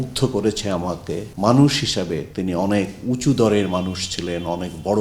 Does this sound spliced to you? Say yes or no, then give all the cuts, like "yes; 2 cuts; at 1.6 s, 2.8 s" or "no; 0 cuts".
yes; 2 cuts; at 1.3 s, 2.3 s